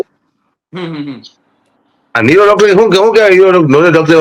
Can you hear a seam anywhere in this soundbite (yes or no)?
no